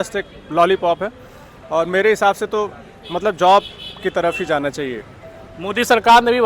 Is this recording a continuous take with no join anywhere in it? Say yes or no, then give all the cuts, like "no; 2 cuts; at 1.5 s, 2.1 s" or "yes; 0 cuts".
yes; 0 cuts